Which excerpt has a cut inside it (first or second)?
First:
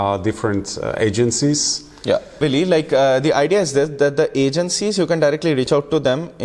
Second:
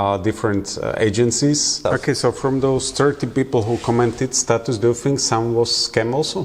second